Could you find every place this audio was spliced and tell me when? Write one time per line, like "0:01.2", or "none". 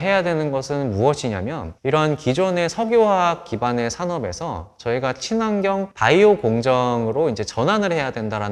none